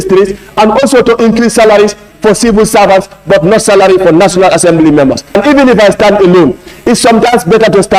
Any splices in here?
yes; 1 cut; at 5.3 s

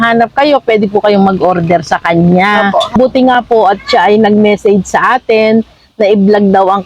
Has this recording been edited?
yes; 1 cut; at 2.9 s

